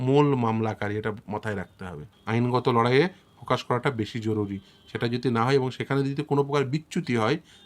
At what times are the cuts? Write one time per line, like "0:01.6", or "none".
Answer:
0:02.1